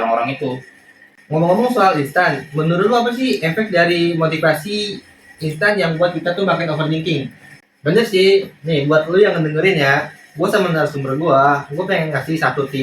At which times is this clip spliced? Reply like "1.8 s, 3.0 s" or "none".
1.2 s, 7.7 s